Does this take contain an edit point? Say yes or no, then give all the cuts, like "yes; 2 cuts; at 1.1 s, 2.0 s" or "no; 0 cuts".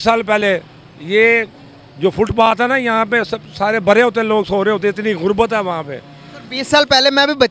no; 0 cuts